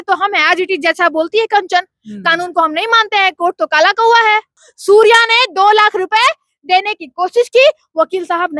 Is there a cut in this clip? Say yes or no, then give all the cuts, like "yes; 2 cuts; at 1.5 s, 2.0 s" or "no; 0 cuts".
yes; 1 cut; at 4.7 s